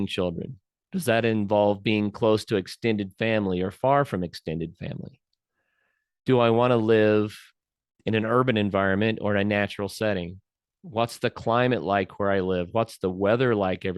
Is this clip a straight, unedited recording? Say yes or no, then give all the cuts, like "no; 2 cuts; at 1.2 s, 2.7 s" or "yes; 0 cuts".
yes; 0 cuts